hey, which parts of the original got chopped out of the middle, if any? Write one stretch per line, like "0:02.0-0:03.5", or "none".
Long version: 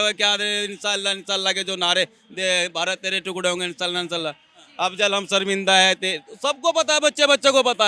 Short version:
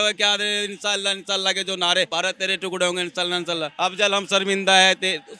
0:02.1-0:02.7
0:04.3-0:04.7